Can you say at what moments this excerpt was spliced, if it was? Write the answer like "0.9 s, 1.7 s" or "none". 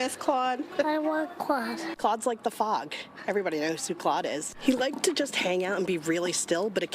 1.9 s, 4.5 s